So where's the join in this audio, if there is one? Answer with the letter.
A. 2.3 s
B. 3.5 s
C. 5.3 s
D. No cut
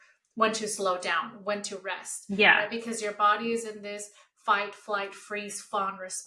D